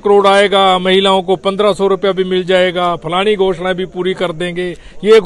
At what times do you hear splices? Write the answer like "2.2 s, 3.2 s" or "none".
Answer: none